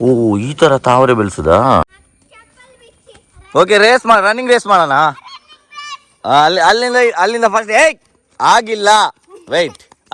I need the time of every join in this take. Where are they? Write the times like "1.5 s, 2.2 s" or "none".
1.9 s